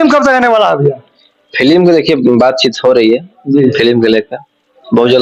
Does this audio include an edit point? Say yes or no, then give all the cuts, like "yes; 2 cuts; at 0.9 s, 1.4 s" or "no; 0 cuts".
no; 0 cuts